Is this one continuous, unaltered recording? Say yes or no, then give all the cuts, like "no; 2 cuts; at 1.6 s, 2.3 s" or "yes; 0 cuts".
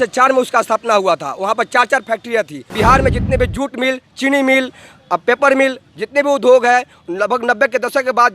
no; 1 cut; at 2.7 s